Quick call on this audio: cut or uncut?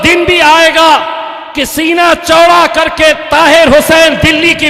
uncut